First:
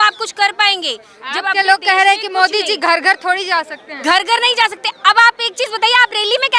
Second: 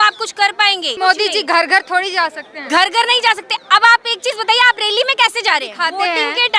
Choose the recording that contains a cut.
second; 2 cuts; at 0.9 s, 5.7 s

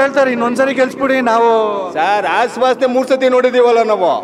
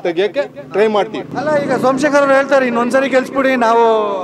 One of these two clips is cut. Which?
second; 1 cut; at 1.2 s

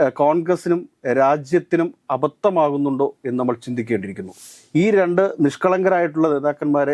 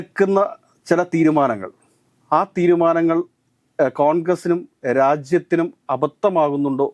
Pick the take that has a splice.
first; 1 cut; at 4.3 s

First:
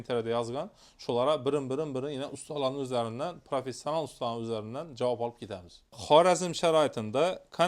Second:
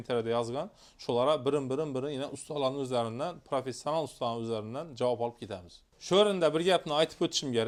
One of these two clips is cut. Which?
first; 1 cut; at 6.0 s

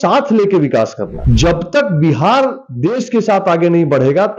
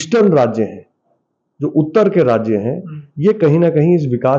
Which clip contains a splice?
first; 1 cut; at 1.1 s

